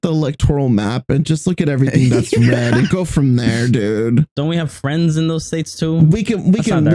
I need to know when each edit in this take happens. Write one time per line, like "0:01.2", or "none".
0:04.3